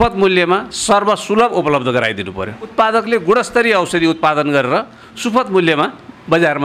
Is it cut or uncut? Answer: cut